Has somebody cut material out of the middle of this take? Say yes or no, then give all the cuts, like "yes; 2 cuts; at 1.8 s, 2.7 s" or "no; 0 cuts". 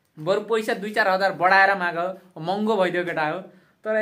no; 0 cuts